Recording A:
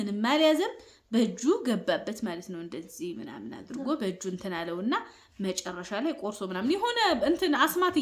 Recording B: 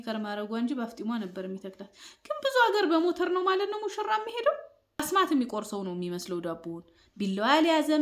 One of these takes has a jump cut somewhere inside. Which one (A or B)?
B